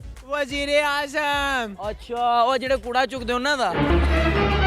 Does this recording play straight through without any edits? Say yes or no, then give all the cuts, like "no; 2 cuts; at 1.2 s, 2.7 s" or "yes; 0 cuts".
no; 1 cut; at 3.7 s